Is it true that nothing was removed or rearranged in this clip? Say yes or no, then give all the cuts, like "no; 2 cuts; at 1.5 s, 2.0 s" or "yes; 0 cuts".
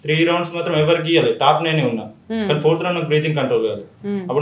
yes; 0 cuts